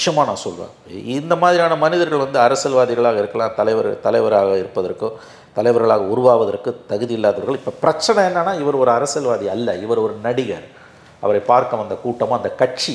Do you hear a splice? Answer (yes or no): no